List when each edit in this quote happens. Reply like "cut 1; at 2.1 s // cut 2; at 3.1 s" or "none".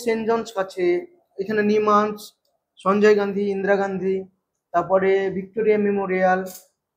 none